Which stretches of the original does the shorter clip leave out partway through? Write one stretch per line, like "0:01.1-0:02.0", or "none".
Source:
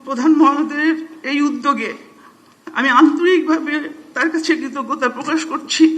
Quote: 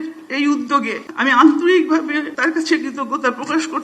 0:02.0-0:02.6
0:03.9-0:04.1